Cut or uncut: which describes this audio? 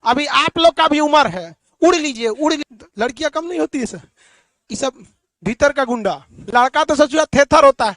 cut